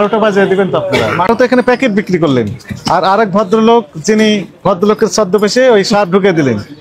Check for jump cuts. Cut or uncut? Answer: cut